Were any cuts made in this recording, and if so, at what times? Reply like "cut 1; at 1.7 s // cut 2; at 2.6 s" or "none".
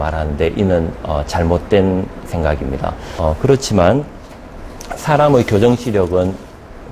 cut 1; at 3.0 s